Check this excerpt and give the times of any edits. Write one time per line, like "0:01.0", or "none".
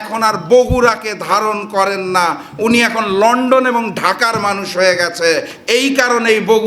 none